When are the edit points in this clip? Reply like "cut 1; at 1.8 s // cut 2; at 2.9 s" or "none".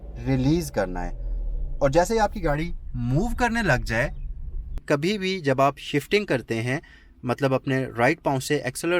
cut 1; at 4.8 s